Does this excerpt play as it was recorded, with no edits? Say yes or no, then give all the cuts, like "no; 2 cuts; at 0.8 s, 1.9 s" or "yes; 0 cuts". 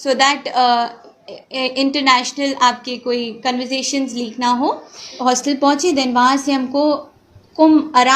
no; 1 cut; at 5.2 s